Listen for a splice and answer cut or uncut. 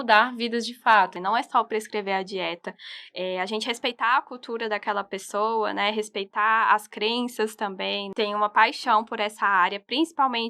cut